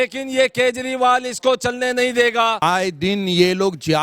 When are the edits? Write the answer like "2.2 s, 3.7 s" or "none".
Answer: 2.6 s